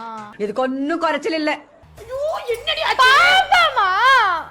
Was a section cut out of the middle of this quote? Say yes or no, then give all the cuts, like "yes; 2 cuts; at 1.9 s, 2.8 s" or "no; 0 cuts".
yes; 1 cut; at 1.8 s